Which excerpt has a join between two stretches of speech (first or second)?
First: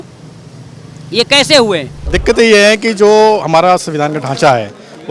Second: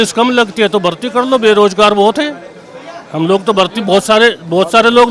first